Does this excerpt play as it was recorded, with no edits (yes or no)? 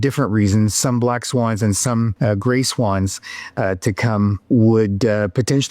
no